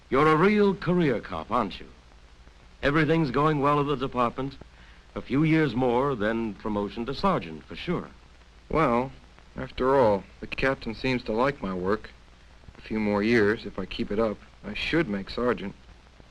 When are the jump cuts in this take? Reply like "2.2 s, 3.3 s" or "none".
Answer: 8.5 s